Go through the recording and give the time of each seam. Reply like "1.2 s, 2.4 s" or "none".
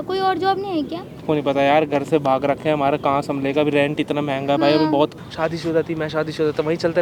1.2 s, 5.1 s